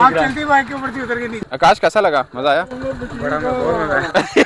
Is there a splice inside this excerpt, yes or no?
yes